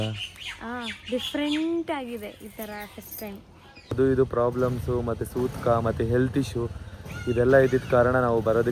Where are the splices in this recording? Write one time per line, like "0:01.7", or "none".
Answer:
0:03.9